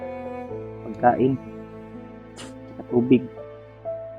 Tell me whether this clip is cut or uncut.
cut